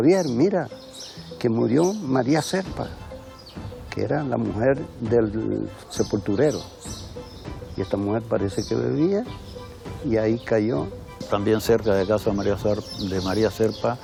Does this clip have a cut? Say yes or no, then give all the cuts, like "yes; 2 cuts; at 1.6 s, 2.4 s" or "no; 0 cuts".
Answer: no; 0 cuts